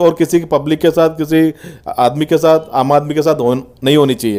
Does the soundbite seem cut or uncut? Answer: uncut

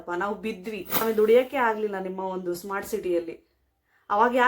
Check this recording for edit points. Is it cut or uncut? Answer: cut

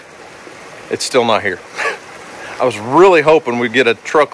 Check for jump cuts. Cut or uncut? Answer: uncut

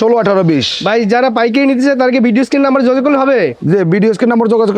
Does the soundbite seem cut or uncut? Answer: uncut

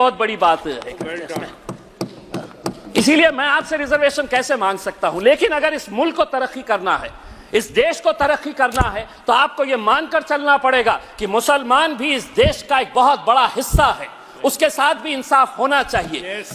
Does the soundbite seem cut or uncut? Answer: uncut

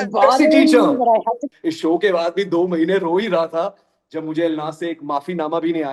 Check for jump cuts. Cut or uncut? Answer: cut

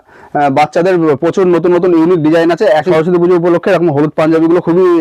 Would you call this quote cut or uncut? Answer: cut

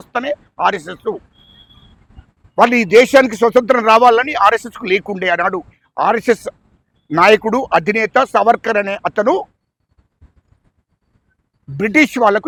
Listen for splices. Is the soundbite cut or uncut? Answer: uncut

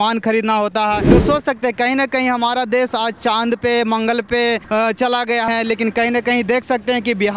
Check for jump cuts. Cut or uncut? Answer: cut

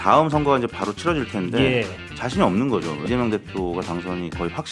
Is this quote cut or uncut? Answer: cut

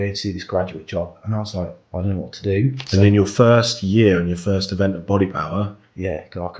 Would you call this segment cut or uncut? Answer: cut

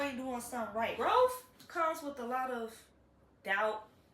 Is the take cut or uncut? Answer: cut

